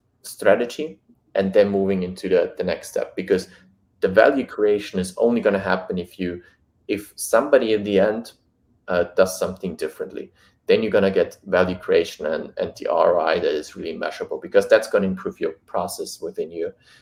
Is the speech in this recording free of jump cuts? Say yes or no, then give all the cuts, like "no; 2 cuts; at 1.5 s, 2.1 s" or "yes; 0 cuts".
yes; 0 cuts